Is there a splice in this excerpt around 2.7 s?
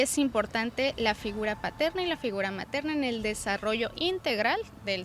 no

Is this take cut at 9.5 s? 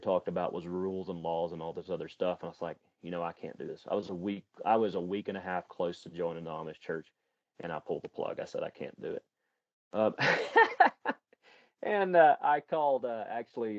no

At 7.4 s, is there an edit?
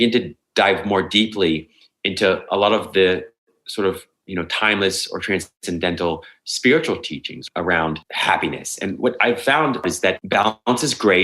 yes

